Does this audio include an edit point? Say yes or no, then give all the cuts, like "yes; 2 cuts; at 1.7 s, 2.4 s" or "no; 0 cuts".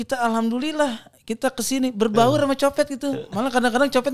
no; 0 cuts